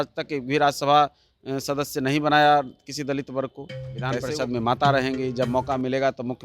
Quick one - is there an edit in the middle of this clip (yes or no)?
yes